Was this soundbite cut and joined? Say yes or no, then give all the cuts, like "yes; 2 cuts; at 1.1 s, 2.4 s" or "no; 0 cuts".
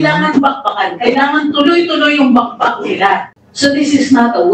yes; 1 cut; at 3.3 s